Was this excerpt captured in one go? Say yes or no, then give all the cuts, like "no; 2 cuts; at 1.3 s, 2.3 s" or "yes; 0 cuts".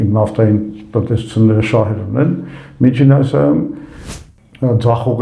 no; 1 cut; at 4.0 s